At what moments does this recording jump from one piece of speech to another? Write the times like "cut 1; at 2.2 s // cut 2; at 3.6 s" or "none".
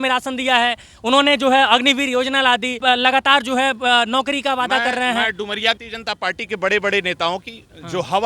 cut 1; at 2.8 s // cut 2; at 5.8 s